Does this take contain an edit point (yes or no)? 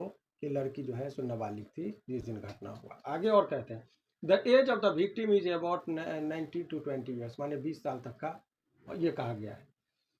no